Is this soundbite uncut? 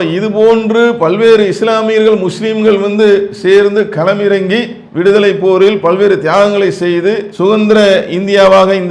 yes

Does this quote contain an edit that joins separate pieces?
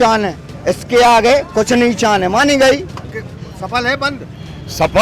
yes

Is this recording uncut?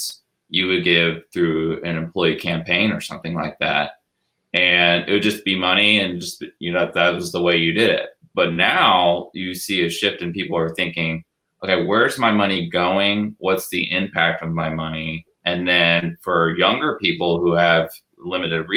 yes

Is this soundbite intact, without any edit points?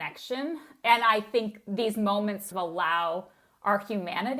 no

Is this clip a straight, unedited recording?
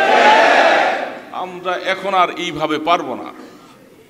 yes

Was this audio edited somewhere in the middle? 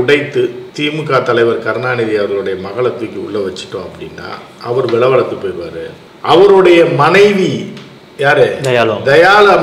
no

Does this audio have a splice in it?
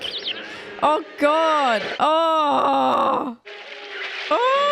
yes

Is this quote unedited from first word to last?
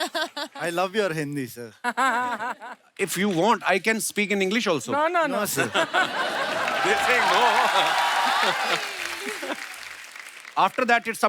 yes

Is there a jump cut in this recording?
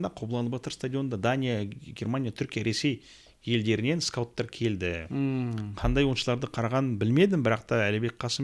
no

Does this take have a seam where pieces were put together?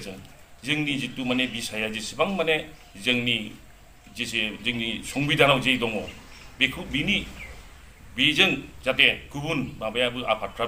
no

